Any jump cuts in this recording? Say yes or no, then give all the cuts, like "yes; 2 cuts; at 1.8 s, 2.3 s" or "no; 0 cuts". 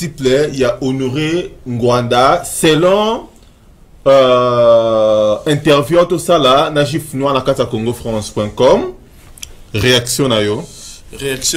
no; 0 cuts